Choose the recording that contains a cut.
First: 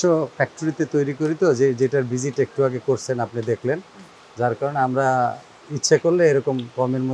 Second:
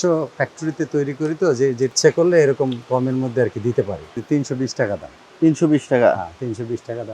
second; 2 cuts; at 1.9 s, 4.2 s

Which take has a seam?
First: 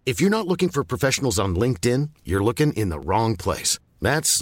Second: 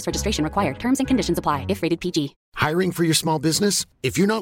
second; 1 cut; at 2.4 s

